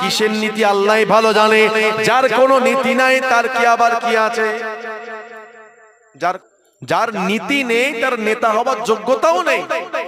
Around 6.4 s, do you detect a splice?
yes; 1 cut; at 6.4 s

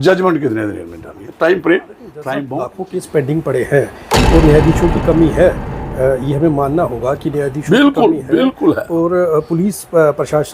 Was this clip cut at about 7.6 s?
no; 1 cut; at 2.4 s

